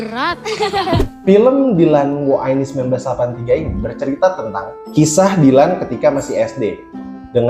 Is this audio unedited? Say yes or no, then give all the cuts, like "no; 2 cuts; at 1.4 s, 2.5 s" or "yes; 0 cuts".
no; 2 cuts; at 1.1 s, 4.8 s